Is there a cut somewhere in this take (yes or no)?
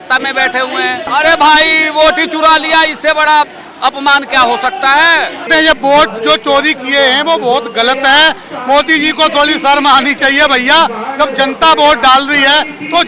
yes